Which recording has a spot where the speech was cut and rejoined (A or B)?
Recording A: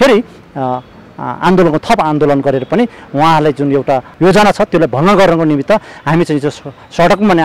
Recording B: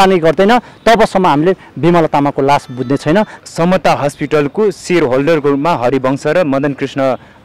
B